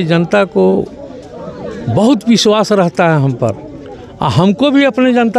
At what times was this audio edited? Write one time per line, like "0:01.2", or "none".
none